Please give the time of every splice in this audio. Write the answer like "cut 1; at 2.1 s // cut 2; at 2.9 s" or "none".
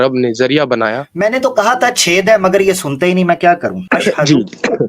cut 1; at 1.1 s // cut 2; at 3.8 s